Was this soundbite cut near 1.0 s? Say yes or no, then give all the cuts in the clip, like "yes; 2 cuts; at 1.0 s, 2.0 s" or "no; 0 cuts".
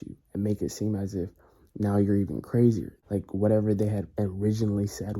no; 1 cut; at 2.9 s